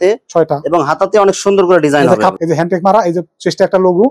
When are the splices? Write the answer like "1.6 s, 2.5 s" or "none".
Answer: 2.3 s